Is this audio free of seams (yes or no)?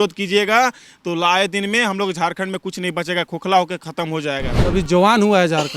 no